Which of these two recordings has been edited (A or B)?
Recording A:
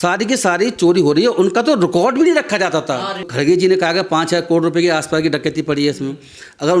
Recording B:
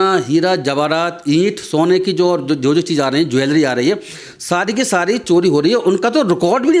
A